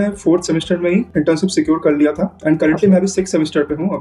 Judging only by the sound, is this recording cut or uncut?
uncut